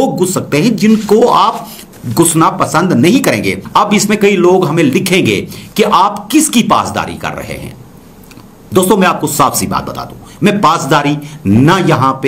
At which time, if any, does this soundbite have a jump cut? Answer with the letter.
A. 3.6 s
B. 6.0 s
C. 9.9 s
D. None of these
A